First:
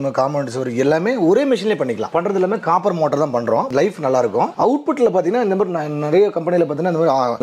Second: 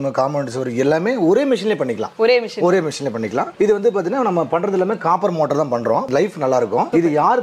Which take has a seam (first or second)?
first